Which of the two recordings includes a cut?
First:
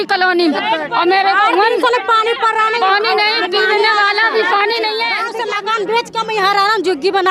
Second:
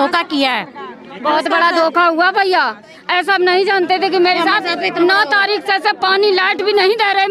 first; 1 cut; at 5.3 s

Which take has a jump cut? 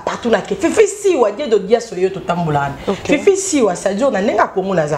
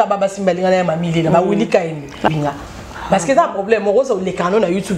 second; 1 cut; at 2.3 s

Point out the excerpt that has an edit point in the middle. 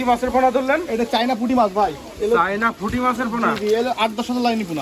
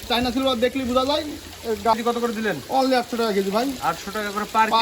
second; 1 cut; at 1.9 s

